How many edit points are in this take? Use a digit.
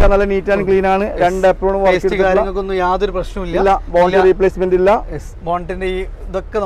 0